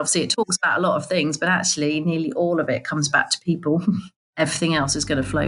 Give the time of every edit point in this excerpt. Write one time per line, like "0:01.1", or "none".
0:04.2